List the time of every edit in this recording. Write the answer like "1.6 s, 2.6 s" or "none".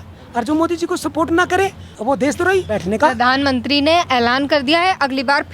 1.9 s, 2.7 s